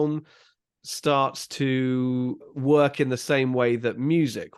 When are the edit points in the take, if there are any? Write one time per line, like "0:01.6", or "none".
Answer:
0:02.5